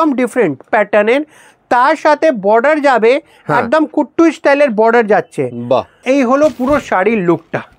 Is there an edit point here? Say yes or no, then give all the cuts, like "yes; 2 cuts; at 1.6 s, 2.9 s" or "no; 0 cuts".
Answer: yes; 1 cut; at 6.0 s